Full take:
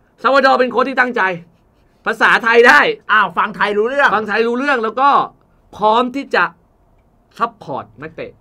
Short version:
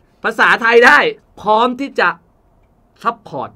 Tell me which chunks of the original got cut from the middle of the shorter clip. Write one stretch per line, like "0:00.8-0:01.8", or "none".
0:03.0-0:05.6